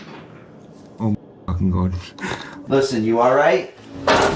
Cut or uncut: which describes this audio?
cut